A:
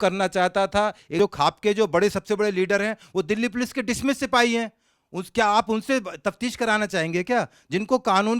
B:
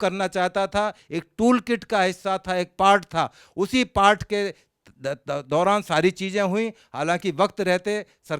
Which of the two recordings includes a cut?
A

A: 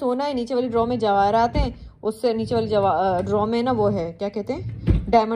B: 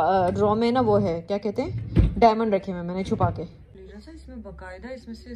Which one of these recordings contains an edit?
B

